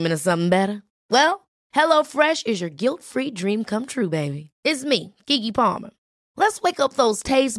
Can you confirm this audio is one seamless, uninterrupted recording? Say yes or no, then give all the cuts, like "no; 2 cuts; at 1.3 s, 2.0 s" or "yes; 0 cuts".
yes; 0 cuts